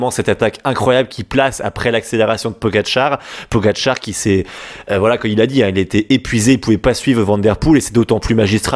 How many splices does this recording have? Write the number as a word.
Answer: zero